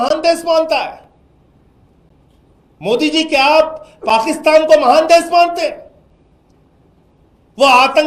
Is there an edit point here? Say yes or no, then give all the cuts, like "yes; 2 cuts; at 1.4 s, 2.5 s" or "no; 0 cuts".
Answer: no; 0 cuts